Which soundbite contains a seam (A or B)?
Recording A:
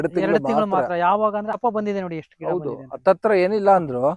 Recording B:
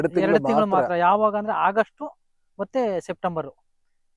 A